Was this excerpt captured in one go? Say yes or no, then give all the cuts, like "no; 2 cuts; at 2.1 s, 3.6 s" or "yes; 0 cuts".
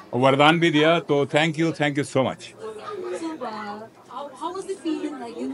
yes; 0 cuts